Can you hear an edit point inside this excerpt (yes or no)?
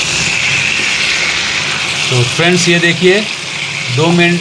no